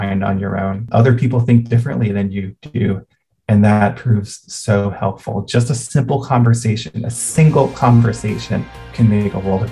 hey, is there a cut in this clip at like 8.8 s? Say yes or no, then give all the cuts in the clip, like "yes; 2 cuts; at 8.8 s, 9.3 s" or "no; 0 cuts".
yes; 2 cuts; at 0.8 s, 8.8 s